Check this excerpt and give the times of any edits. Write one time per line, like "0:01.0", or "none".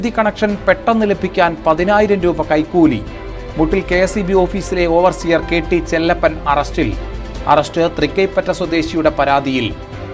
none